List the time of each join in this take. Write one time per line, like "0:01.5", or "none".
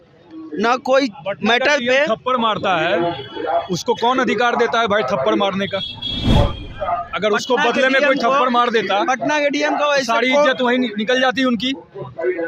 none